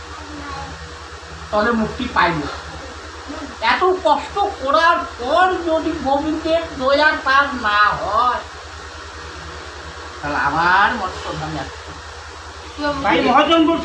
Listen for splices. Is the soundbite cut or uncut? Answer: cut